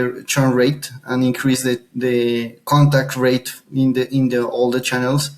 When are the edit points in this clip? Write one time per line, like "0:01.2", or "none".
none